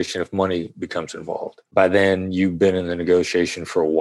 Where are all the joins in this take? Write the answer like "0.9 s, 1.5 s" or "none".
1.6 s

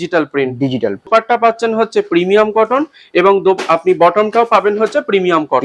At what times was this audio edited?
1.1 s

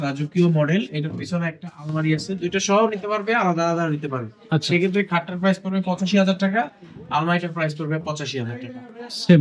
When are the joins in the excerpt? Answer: none

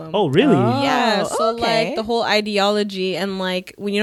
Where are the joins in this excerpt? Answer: none

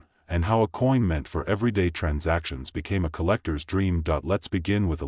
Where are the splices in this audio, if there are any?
none

